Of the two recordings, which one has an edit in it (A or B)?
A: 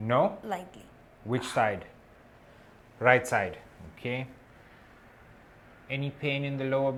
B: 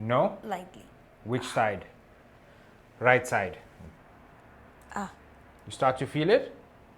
B